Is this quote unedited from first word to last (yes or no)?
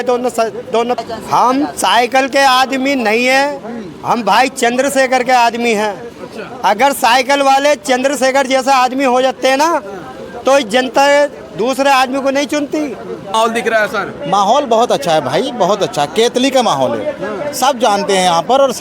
no